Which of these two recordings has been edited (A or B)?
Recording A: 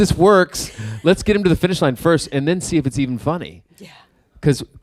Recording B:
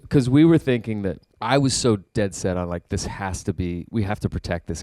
B